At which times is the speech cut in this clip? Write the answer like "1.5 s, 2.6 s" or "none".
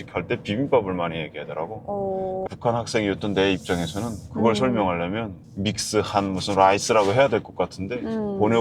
2.4 s